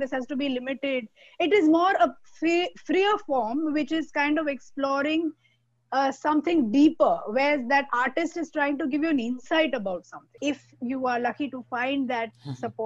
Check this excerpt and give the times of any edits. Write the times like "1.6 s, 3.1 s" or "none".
10.4 s